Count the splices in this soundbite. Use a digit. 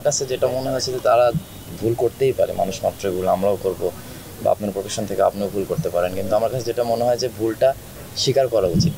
0